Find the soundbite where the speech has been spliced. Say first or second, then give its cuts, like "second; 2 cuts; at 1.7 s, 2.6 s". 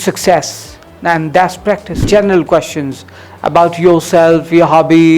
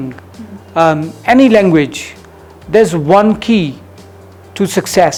first; 1 cut; at 2.0 s